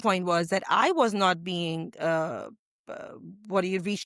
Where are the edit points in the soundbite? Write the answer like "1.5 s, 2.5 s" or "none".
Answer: none